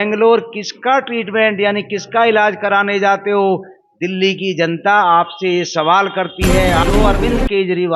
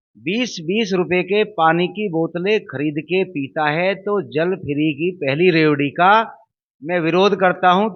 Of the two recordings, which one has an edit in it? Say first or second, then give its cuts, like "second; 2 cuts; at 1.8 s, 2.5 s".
first; 1 cut; at 6.8 s